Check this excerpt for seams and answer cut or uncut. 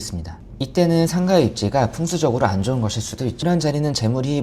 cut